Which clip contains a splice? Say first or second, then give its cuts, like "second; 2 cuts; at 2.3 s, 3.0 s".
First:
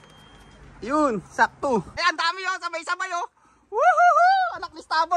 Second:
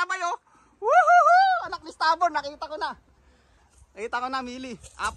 first; 1 cut; at 1.9 s